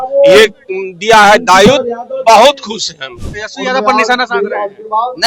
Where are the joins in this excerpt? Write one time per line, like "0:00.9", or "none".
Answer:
0:03.2